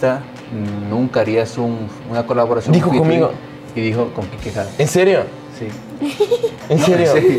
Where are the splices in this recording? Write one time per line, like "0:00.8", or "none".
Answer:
none

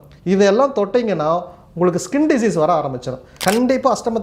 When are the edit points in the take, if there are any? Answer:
0:03.2

